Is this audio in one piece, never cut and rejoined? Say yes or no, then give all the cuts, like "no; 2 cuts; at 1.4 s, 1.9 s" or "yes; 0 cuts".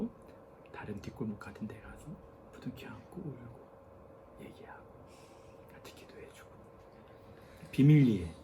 yes; 0 cuts